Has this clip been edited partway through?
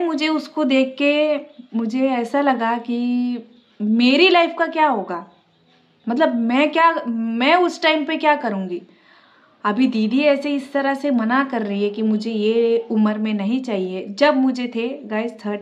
no; 0 cuts

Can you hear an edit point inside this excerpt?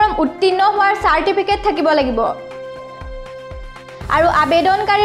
yes; 2 cuts; at 2.4 s, 4.1 s

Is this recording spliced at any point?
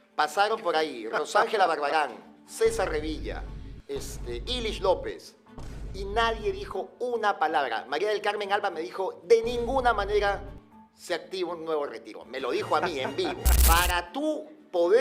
yes; 1 cut; at 13.5 s

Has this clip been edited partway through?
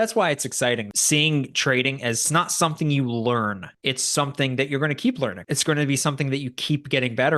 yes; 4 cuts; at 0.9 s, 2.2 s, 3.7 s, 5.5 s

